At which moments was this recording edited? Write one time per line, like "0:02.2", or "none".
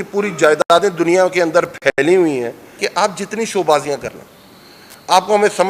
0:02.7